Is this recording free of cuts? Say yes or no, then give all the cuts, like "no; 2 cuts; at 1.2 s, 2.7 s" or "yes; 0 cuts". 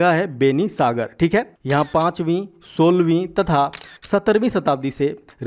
yes; 0 cuts